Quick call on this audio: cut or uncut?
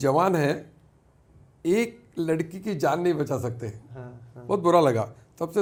uncut